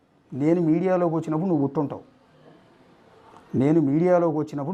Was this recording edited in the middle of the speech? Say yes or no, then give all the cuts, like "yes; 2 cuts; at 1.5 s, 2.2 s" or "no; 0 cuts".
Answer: no; 0 cuts